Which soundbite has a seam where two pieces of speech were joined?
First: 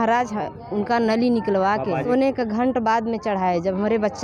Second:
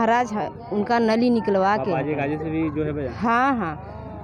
first; 1 cut; at 2.1 s

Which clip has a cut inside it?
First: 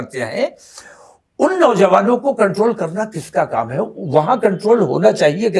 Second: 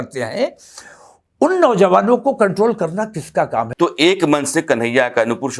second; 1 cut; at 3.7 s

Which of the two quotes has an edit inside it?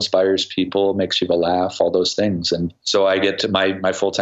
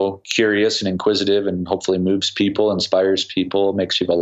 first; 1 cut; at 2.8 s

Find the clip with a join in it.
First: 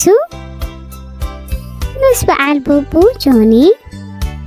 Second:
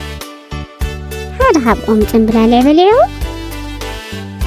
second; 2 cuts; at 1.0 s, 3.1 s

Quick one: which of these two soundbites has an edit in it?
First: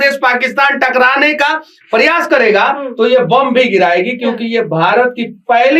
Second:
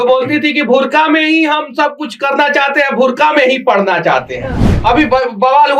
second; 1 cut; at 4.8 s

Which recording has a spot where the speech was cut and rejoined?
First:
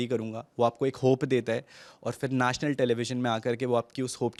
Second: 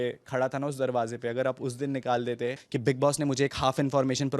second; 1 cut; at 2.7 s

